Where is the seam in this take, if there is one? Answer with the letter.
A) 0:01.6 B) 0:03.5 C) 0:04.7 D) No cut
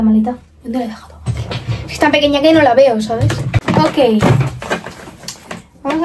D